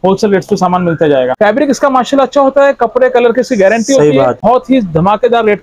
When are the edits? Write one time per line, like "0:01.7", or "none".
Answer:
0:01.3
0:04.4